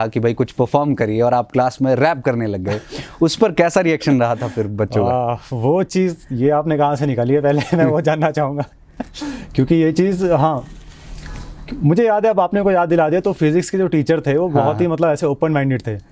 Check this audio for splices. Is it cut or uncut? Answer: uncut